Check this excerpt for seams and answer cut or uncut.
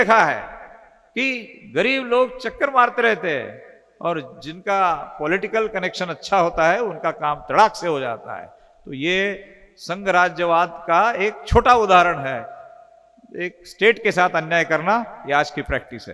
uncut